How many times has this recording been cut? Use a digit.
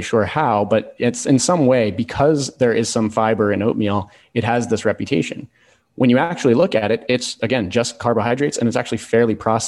0